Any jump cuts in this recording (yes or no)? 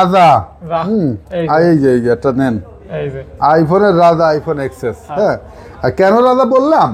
no